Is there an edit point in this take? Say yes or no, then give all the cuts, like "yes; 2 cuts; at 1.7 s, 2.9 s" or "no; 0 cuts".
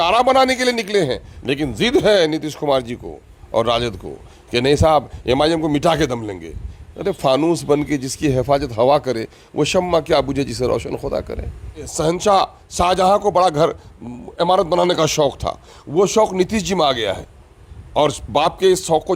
yes; 2 cuts; at 1.3 s, 11.9 s